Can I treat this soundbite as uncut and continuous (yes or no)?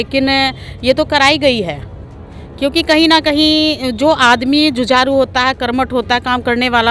yes